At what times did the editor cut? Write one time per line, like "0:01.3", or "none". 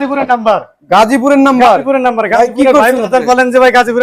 none